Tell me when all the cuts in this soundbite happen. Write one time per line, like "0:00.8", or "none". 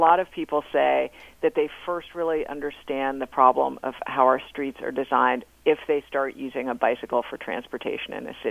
none